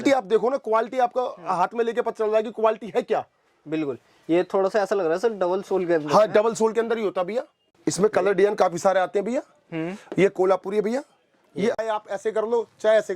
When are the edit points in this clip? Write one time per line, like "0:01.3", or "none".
0:07.7
0:11.8